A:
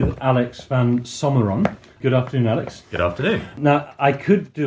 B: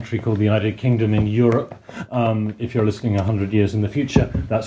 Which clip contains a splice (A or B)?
A